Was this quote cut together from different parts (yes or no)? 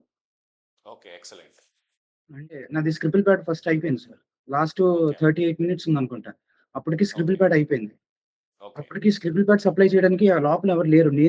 yes